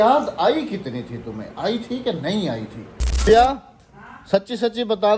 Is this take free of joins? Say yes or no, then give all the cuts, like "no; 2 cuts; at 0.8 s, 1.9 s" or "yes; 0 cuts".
no; 1 cut; at 3.3 s